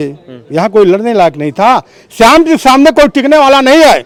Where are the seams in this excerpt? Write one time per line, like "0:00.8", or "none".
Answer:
none

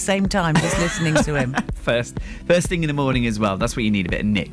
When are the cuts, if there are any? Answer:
0:02.3

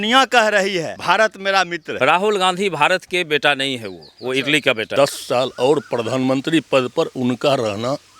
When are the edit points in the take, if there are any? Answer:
0:00.9
0:01.8
0:04.9

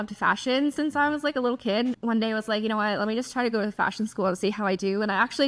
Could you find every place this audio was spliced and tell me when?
0:02.0

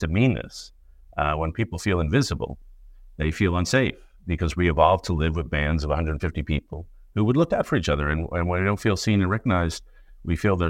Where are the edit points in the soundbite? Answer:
none

